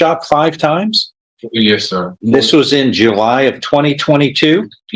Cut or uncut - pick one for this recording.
uncut